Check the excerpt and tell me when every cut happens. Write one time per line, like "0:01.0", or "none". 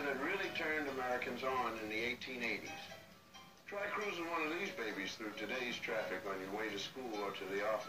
none